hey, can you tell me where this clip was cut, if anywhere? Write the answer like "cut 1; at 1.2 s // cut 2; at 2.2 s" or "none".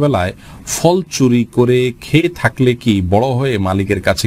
none